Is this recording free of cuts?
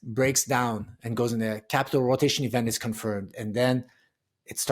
yes; 0 cuts

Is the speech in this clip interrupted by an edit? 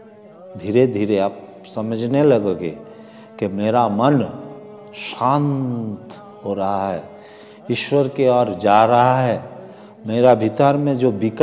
no; 0 cuts

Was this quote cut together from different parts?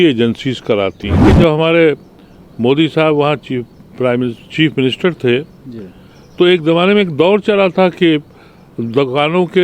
yes; 1 cut; at 1.2 s

